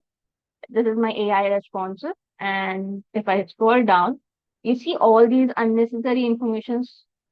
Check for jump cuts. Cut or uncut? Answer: uncut